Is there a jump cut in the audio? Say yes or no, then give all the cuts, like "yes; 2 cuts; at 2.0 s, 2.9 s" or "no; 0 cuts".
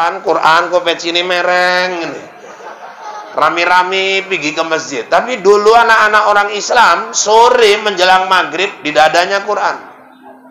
no; 0 cuts